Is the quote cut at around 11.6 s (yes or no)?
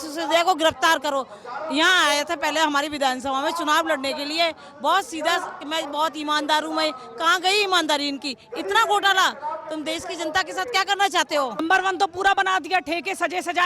yes